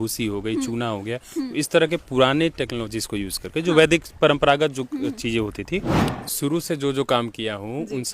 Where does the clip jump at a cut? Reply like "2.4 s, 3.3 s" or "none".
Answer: 6.0 s